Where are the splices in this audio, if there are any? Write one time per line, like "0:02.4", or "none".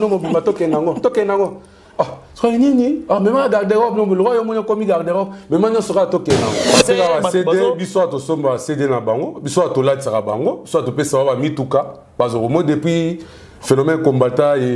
0:06.6

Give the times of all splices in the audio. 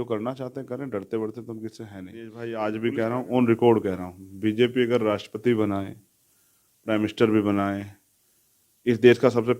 0:02.4

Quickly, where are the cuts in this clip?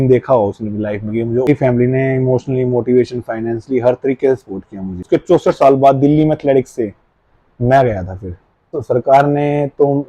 0:01.5
0:05.0
0:08.7

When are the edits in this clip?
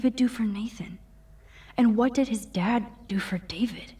0:01.9

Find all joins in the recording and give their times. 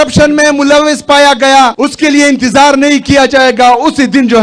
0:01.7

